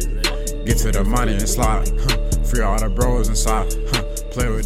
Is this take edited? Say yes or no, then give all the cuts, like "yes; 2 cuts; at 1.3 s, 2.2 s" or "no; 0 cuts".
no; 0 cuts